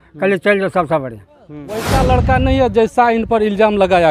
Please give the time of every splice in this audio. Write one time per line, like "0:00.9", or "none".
0:01.8

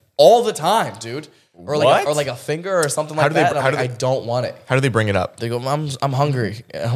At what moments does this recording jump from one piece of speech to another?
0:05.4

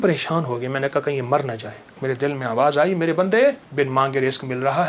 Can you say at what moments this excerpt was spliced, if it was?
0:02.0
0:03.6

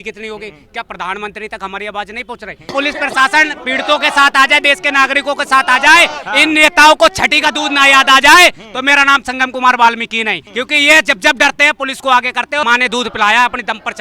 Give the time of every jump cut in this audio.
0:02.7
0:10.4
0:12.6

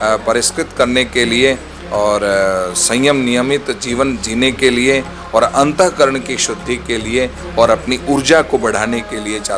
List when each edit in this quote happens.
none

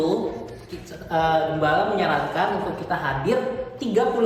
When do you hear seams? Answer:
none

